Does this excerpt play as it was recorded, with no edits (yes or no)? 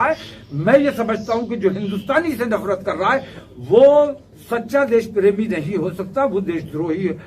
yes